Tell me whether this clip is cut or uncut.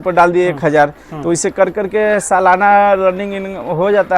uncut